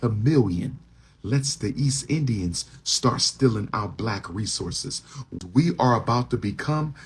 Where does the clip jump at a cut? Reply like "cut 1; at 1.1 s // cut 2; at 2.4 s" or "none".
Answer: cut 1; at 5.4 s

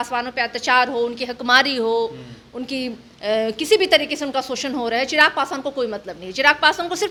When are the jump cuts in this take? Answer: none

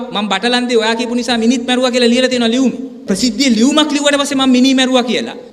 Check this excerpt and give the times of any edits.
cut 1; at 3.0 s

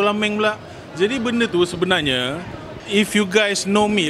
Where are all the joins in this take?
cut 1; at 2.8 s

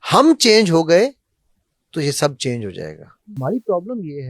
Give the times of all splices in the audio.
cut 1; at 3.3 s

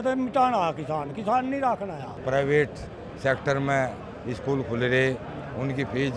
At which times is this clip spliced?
cut 1; at 2.1 s

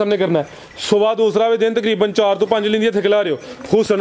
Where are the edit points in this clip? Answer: none

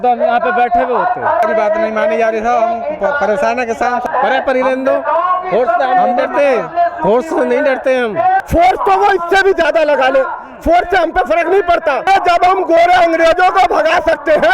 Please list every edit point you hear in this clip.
cut 1; at 1.4 s // cut 2; at 4.1 s // cut 3; at 8.4 s // cut 4; at 12.1 s

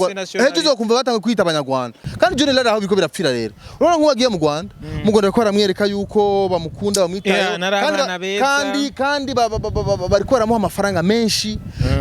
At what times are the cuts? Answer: cut 1; at 2.0 s

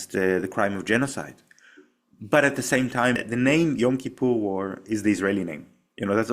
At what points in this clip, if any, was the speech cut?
cut 1; at 3.2 s

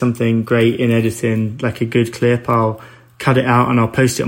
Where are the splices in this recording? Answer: none

